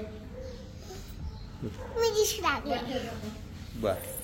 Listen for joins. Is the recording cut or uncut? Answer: uncut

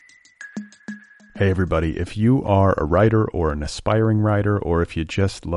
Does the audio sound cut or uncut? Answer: cut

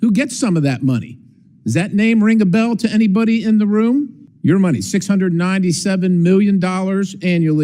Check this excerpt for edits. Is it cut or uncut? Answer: cut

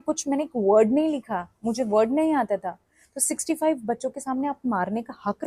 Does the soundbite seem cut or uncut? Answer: uncut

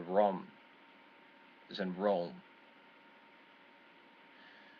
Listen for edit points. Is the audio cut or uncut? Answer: uncut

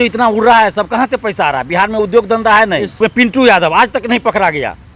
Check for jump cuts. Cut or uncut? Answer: cut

